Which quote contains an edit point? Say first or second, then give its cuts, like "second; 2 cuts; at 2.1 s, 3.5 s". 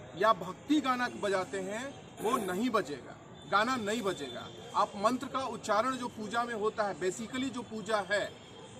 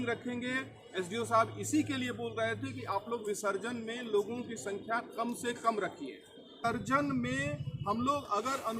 second; 1 cut; at 6.6 s